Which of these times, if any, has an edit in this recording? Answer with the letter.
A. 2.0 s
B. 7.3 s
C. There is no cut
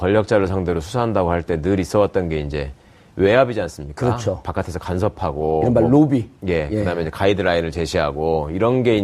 A